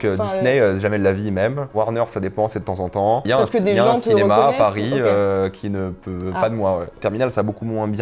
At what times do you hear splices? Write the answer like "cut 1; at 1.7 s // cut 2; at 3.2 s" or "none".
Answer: cut 1; at 3.2 s // cut 2; at 7.0 s